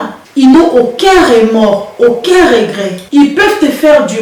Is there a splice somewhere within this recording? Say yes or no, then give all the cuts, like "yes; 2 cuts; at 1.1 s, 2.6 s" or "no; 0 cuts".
no; 0 cuts